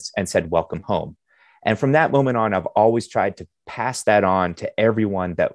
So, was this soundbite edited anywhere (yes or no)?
no